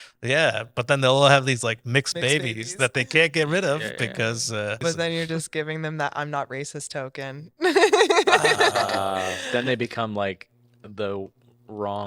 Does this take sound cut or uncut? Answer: cut